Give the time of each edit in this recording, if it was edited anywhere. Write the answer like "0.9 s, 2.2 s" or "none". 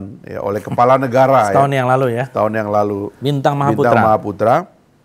3.1 s